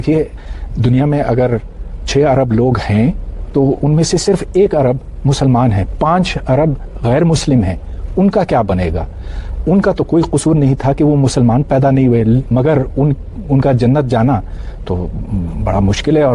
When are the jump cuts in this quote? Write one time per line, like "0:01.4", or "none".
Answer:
none